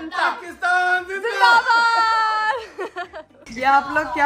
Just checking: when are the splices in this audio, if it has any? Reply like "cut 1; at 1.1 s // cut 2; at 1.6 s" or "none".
none